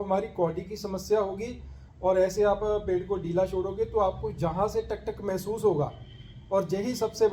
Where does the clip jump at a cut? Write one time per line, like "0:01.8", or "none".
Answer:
none